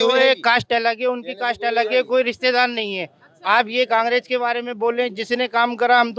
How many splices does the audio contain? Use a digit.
0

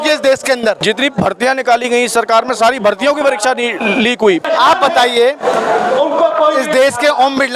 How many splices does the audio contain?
2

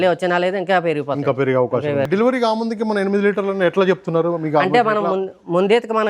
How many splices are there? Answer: 1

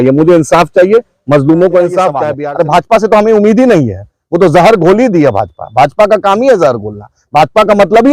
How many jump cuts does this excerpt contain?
1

